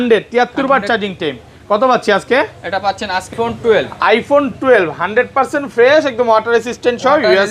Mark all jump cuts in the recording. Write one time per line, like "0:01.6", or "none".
0:03.3

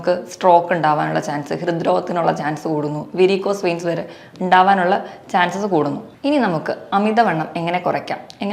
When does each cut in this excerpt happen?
0:06.1

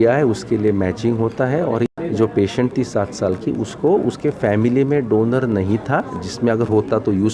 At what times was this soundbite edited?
0:01.9

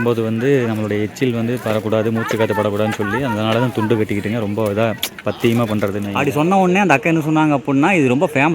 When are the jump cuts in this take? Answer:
0:06.1

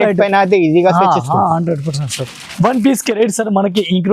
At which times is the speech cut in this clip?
0:02.4

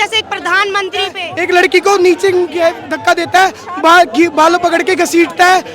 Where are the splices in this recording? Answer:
0:01.2

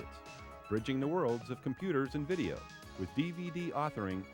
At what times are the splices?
none

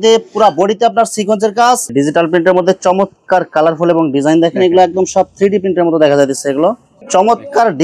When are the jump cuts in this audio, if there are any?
0:01.9
0:07.0

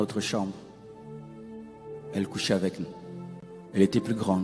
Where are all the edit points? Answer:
0:03.5

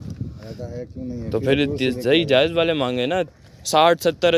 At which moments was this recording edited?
0:03.3

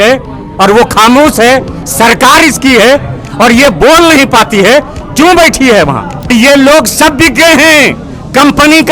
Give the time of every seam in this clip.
0:06.3

